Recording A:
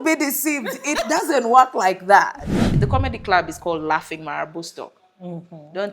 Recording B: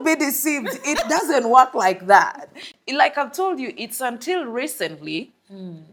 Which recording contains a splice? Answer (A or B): A